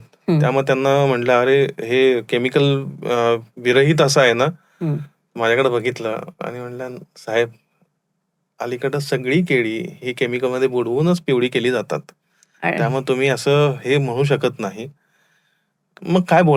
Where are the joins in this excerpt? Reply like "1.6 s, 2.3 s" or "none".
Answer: none